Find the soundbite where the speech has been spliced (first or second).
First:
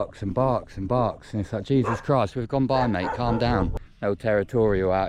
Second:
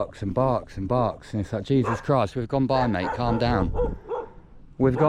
first